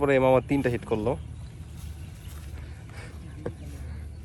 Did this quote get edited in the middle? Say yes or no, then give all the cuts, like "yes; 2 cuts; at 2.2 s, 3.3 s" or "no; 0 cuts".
no; 0 cuts